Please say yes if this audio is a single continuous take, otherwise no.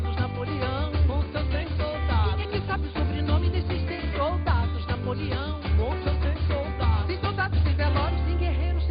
yes